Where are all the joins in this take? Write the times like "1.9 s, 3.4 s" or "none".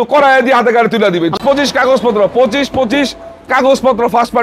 1.4 s